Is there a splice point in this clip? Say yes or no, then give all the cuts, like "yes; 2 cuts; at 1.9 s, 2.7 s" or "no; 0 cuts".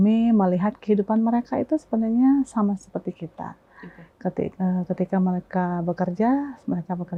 no; 0 cuts